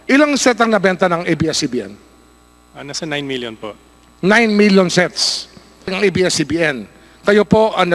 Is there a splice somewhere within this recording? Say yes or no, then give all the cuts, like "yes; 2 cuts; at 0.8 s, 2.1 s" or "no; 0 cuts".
yes; 1 cut; at 5.9 s